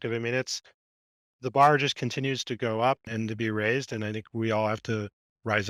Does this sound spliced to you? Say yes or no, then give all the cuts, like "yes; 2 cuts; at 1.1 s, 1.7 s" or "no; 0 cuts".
no; 0 cuts